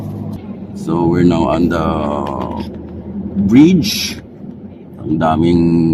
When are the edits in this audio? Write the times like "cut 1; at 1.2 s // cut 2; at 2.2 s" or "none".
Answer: none